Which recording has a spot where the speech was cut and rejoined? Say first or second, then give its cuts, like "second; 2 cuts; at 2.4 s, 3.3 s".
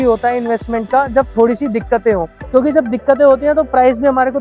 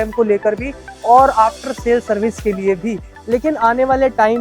second; 1 cut; at 3.1 s